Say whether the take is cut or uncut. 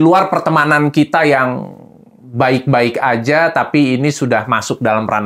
uncut